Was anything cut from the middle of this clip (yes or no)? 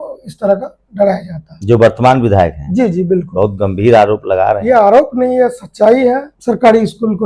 yes